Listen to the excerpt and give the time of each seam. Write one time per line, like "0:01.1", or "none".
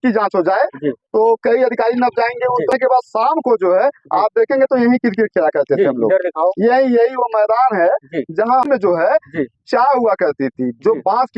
0:02.7
0:08.7